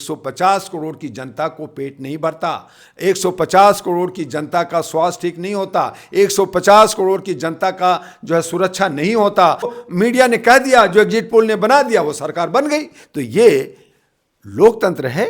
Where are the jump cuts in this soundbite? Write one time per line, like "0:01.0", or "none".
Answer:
0:09.8